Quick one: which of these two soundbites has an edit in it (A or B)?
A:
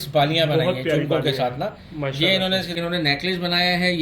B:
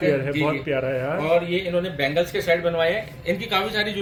A